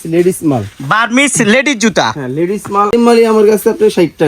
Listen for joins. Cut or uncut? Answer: cut